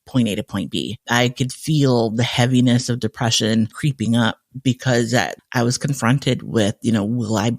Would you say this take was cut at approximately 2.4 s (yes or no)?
no